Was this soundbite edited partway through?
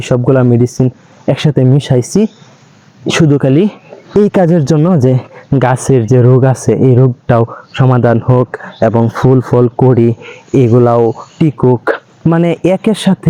no; 0 cuts

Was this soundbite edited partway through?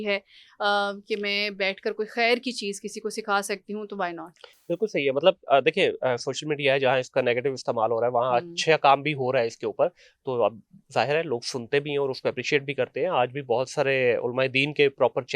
no; 0 cuts

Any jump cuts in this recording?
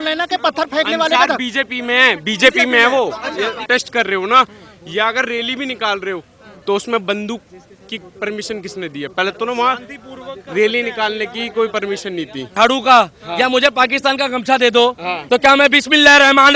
yes; 2 cuts; at 3.6 s, 12.5 s

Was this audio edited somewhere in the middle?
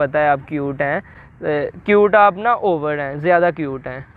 no; 0 cuts

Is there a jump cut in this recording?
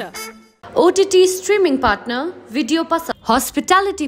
yes; 1 cut; at 3.1 s

